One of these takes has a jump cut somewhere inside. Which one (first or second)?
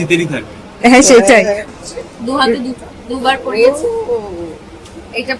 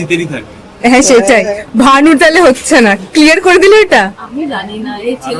first